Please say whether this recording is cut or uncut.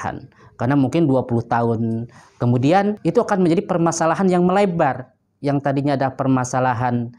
uncut